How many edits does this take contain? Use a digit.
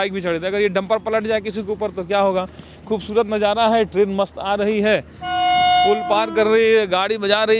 0